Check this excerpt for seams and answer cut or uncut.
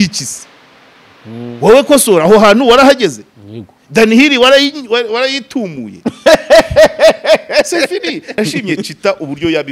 cut